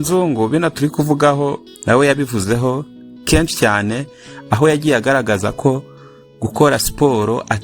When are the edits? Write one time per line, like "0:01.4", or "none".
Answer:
0:01.7